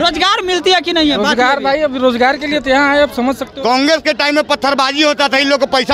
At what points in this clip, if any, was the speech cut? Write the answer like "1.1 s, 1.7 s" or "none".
3.5 s